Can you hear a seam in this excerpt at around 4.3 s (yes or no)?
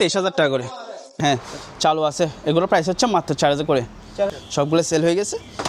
yes